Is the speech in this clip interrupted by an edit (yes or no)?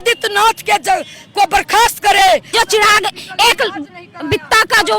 yes